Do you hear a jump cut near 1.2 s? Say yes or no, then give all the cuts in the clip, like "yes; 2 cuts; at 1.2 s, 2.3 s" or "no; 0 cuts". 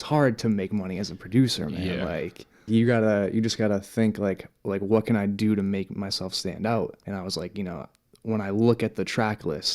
no; 2 cuts; at 2.7 s, 7.0 s